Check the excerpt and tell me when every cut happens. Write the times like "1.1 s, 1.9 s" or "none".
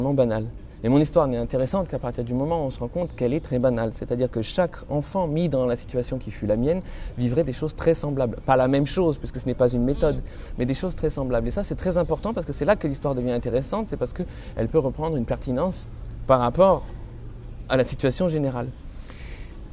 12.8 s